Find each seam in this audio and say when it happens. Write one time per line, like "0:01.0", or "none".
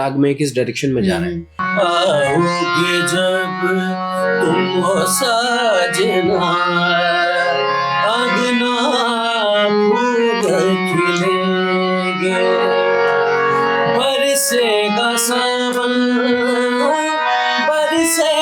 0:01.6